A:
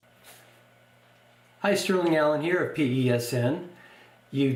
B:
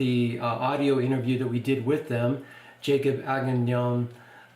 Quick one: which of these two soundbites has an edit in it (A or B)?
B